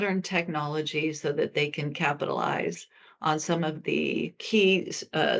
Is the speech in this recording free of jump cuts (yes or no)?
no